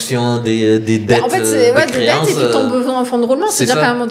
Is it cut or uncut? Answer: uncut